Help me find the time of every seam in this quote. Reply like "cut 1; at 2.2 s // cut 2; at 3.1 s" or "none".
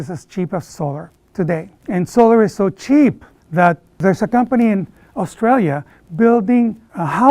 cut 1; at 1.7 s